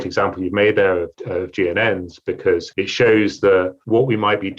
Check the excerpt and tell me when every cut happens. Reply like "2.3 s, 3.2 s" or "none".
1.1 s, 2.7 s, 3.8 s